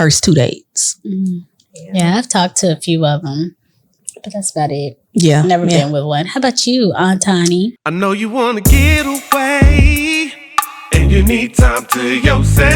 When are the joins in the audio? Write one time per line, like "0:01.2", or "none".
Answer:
0:07.8